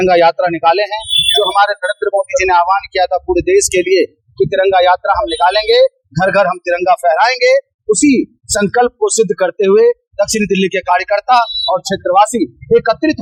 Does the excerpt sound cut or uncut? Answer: uncut